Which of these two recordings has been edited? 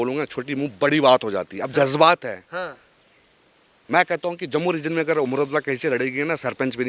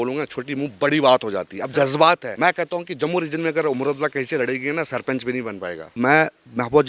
second; 2 cuts; at 2.3 s, 6.0 s

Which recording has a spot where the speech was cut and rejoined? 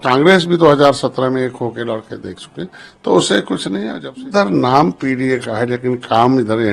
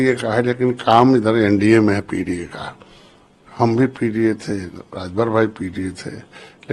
first; 1 cut; at 4.0 s

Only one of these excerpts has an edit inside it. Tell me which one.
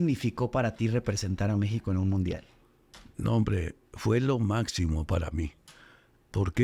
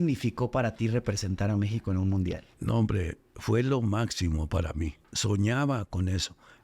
second; 2 cuts; at 2.5 s, 5.1 s

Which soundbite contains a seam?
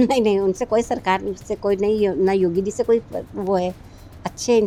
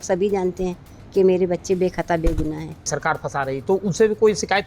second; 1 cut; at 2.9 s

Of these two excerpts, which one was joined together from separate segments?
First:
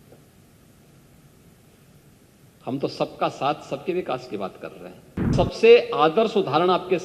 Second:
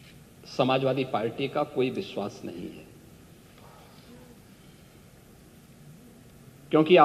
first; 1 cut; at 5.3 s

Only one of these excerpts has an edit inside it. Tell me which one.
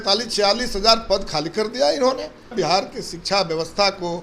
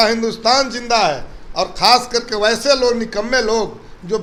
first; 1 cut; at 2.5 s

